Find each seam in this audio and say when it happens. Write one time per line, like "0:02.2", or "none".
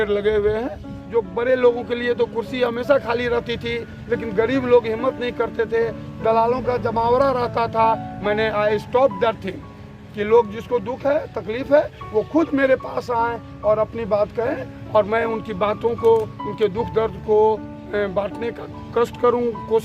0:01.1